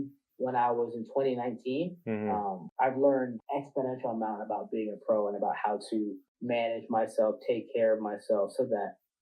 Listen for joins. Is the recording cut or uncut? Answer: cut